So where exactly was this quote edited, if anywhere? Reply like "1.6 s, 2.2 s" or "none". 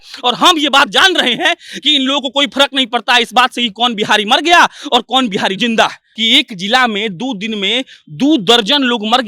6.1 s